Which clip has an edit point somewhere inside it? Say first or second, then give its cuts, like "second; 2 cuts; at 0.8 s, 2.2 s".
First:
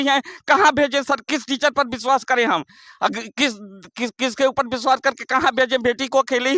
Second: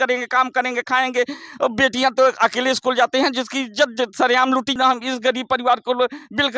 second; 1 cut; at 4.8 s